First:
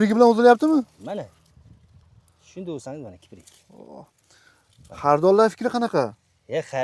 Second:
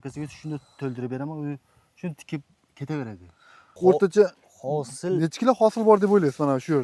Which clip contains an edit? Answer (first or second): second